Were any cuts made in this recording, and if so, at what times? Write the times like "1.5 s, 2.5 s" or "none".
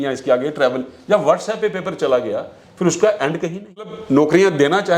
4.0 s